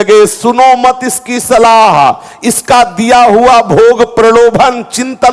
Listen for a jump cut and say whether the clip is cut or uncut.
uncut